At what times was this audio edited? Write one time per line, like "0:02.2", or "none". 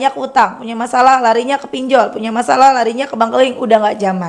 none